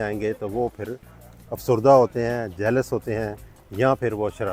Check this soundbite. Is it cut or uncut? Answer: uncut